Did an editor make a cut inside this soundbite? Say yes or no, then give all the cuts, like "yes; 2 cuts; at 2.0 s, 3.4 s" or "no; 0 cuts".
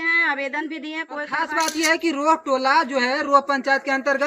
yes; 1 cut; at 1.4 s